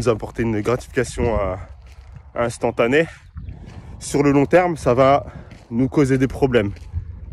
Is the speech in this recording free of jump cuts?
yes; 0 cuts

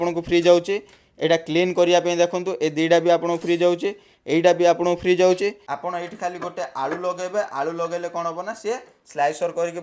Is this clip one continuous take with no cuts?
no; 1 cut; at 5.7 s

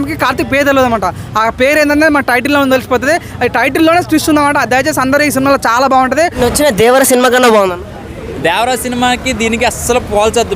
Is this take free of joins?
no; 1 cut; at 6.3 s

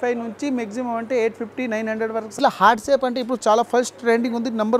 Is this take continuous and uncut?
no; 1 cut; at 2.4 s

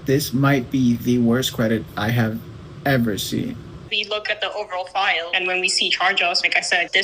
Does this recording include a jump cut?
yes; 1 cut; at 3.9 s

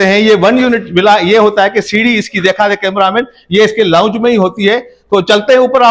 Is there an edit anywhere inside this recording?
no; 0 cuts

